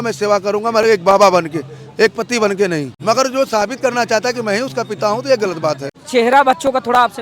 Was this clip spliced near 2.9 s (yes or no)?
yes